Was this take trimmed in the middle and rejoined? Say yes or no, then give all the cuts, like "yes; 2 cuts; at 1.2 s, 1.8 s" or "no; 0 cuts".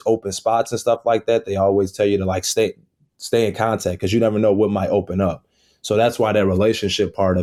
no; 0 cuts